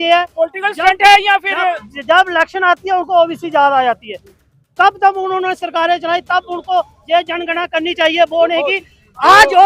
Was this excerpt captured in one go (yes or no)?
yes